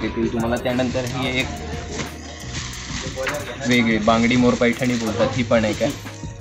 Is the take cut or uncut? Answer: uncut